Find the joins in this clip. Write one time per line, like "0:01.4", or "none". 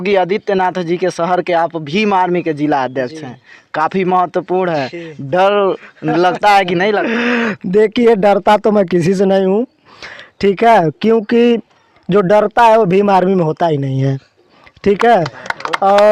none

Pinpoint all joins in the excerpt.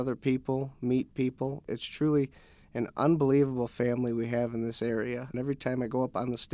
0:05.3

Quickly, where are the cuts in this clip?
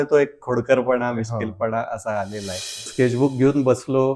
0:02.8

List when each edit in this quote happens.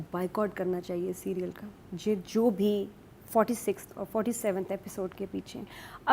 none

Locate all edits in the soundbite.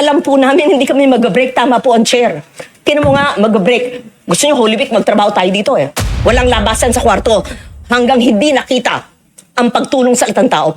0:06.0

